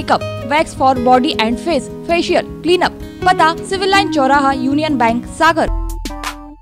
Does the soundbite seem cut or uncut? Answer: cut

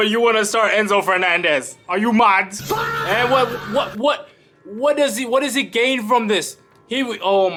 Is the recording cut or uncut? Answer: uncut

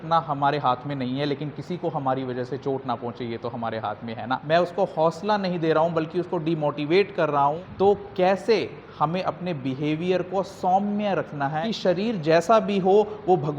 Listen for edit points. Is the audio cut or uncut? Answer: cut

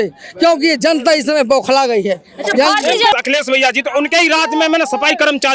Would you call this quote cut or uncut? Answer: cut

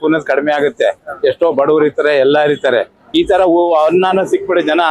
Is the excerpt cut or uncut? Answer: cut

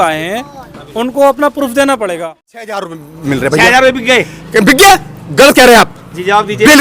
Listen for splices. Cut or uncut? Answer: cut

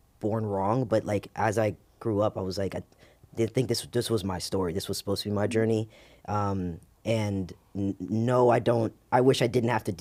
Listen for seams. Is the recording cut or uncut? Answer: uncut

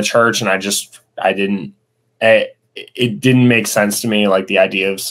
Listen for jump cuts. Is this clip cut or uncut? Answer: uncut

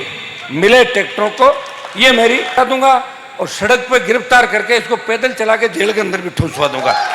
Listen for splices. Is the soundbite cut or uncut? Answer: cut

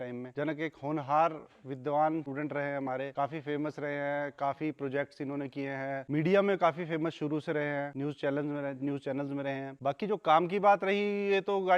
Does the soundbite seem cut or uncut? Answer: uncut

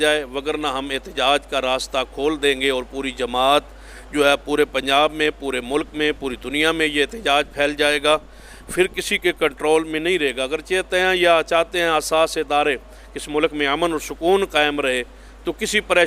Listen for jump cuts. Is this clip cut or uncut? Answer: uncut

